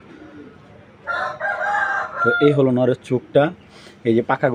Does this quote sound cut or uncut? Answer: uncut